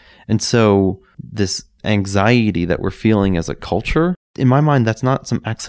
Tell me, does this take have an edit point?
yes; 2 cuts; at 1.0 s, 4.3 s

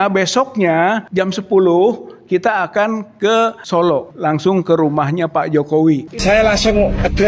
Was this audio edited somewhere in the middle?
yes; 1 cut; at 6.1 s

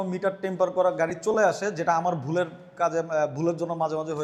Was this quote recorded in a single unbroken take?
yes; 0 cuts

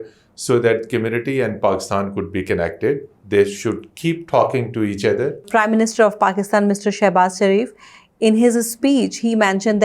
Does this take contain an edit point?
yes; 1 cut; at 5.5 s

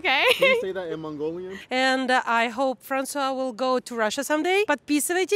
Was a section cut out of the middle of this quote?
yes; 2 cuts; at 1.5 s, 4.7 s

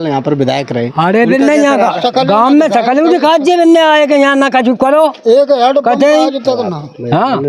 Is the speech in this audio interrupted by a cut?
no; 0 cuts

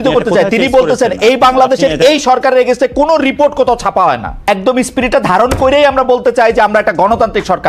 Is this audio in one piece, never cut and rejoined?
no; 1 cut; at 4.5 s

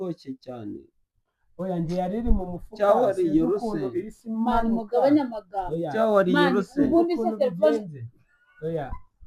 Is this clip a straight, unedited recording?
yes; 0 cuts

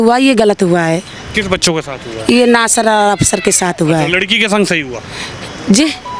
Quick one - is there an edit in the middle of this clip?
no; 0 cuts

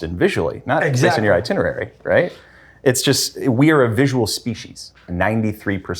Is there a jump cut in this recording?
yes; 1 cut; at 5.1 s

